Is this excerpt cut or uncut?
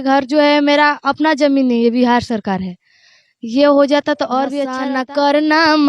cut